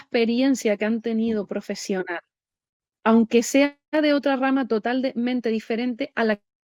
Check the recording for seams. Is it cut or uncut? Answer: uncut